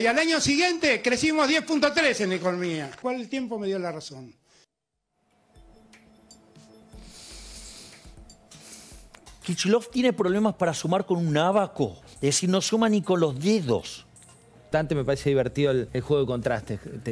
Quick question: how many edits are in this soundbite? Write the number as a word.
five